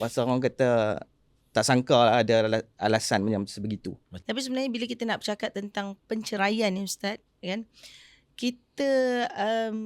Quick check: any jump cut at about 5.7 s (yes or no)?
no